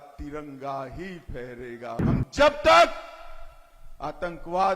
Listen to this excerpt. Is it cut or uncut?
cut